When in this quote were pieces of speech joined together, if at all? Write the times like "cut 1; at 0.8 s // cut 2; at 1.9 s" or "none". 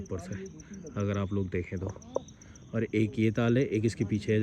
none

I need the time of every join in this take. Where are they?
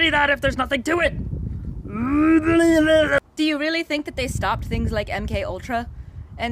cut 1; at 3.2 s

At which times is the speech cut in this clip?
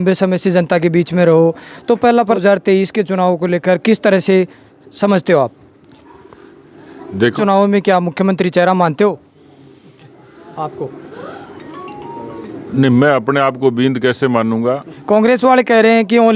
cut 1; at 2.2 s // cut 2; at 7.3 s // cut 3; at 14.9 s

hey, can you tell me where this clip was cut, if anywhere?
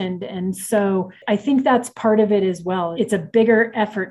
cut 1; at 1.2 s // cut 2; at 2.9 s

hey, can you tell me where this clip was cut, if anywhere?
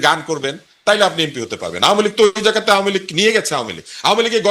none

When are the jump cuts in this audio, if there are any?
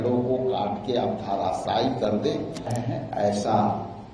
cut 1; at 2.7 s

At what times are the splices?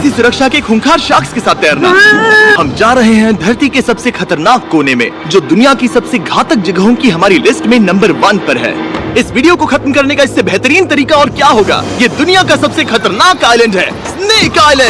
cut 1; at 2.5 s

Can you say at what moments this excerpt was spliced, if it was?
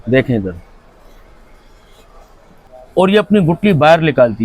cut 1; at 2.6 s

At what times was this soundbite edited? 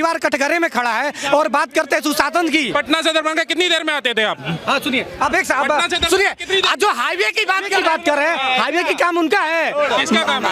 cut 1; at 2.7 s

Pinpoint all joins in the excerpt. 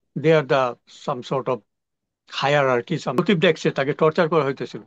cut 1; at 3.2 s

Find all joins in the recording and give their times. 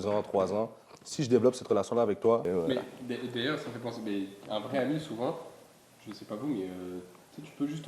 cut 1; at 2.5 s

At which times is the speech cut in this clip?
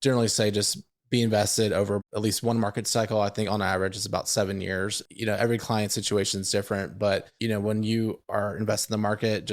cut 1; at 2.0 s // cut 2; at 5.0 s // cut 3; at 7.3 s

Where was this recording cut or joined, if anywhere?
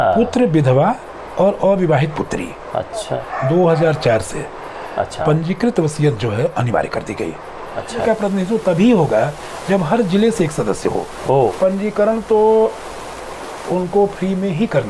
cut 1; at 3.2 s // cut 2; at 8.0 s // cut 3; at 11.5 s

